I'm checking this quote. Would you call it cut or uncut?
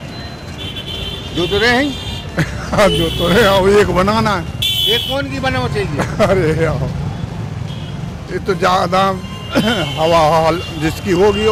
uncut